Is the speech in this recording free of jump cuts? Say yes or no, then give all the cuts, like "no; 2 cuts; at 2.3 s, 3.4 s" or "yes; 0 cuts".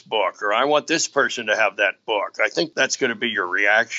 no; 1 cut; at 2.7 s